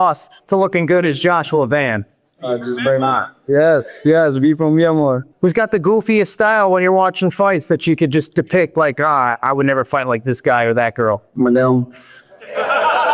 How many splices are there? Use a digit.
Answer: 1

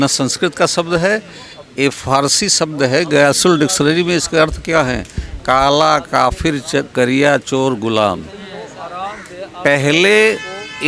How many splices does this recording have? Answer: 0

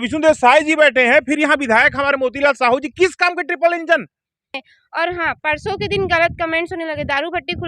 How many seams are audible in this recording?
1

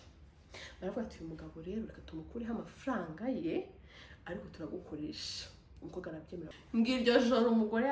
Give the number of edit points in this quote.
1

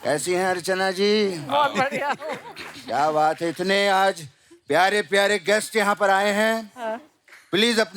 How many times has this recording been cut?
0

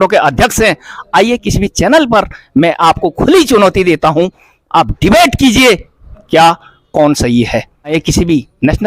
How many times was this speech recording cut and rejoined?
1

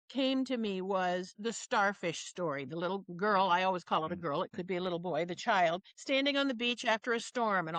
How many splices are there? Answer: 2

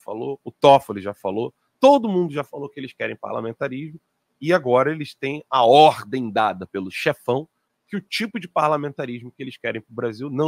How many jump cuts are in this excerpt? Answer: 0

